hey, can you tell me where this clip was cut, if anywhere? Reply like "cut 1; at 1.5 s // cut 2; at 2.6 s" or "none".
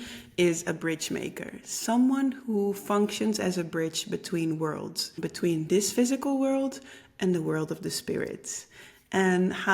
cut 1; at 5.2 s